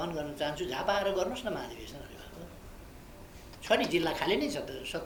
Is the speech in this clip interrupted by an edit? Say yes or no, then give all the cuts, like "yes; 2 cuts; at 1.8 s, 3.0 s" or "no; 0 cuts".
no; 0 cuts